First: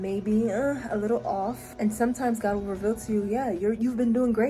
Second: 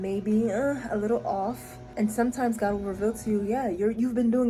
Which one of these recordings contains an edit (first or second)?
first